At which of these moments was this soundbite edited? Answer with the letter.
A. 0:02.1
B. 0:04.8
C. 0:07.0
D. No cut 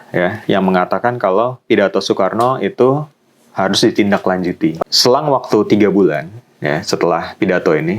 B